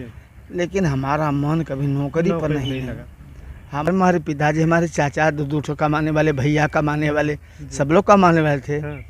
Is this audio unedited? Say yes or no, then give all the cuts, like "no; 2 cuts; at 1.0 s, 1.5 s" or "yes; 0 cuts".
no; 1 cut; at 3.9 s